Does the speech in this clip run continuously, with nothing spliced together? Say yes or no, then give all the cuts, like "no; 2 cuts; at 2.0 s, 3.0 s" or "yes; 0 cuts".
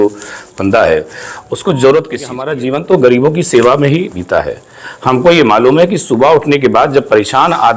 no; 1 cut; at 2.6 s